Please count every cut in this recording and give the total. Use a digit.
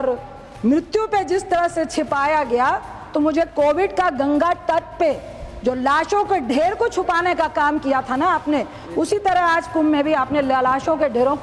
0